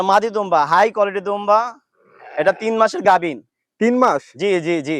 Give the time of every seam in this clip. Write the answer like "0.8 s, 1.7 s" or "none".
none